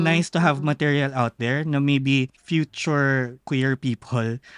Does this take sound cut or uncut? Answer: cut